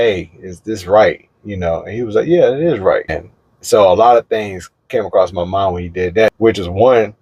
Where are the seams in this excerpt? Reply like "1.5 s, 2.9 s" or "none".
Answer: 3.2 s, 6.3 s